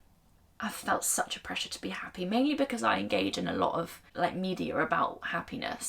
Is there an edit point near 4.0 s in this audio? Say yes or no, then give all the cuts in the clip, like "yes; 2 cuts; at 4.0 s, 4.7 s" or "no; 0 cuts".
yes; 1 cut; at 4.0 s